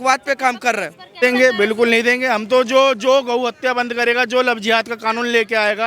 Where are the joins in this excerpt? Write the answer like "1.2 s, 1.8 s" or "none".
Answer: 1.2 s